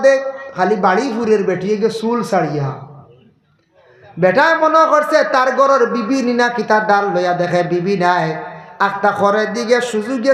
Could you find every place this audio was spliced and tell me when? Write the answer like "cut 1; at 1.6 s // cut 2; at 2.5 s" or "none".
none